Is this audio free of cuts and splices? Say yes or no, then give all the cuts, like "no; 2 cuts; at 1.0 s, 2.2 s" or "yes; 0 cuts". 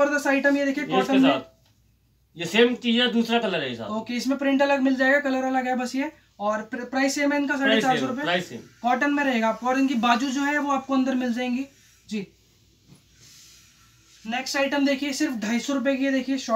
yes; 0 cuts